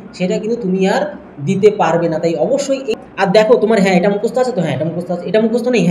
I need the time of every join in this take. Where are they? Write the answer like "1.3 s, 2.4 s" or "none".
2.9 s